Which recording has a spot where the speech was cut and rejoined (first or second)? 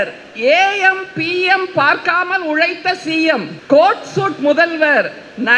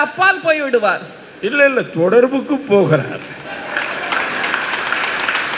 first